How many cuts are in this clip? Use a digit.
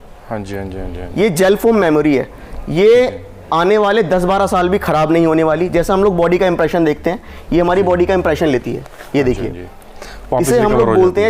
0